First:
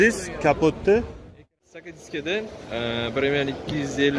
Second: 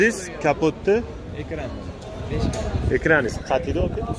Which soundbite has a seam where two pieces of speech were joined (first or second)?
first